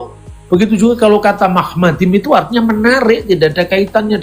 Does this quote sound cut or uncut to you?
uncut